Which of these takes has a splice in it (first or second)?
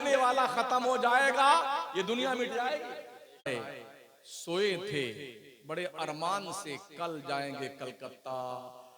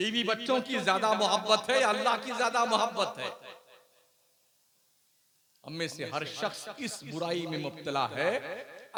first